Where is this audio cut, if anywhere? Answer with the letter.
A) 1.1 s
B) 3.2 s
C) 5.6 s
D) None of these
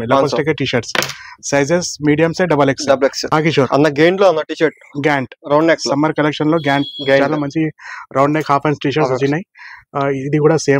B